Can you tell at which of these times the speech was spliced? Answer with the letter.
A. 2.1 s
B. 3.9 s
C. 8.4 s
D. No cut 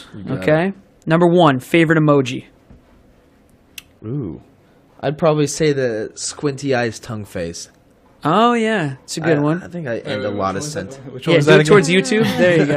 C